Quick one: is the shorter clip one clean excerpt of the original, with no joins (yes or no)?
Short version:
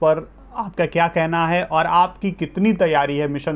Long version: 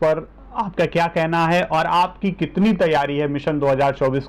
yes